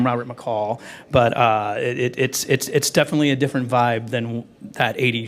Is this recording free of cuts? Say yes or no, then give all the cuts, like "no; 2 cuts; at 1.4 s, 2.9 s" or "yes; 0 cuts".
no; 1 cut; at 1.7 s